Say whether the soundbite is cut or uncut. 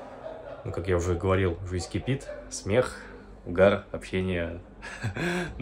uncut